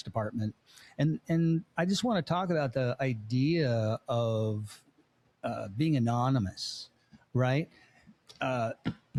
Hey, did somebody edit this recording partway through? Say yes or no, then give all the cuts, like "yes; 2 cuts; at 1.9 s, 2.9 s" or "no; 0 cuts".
no; 0 cuts